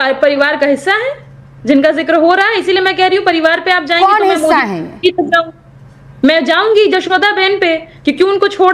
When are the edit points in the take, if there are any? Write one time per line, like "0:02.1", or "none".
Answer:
none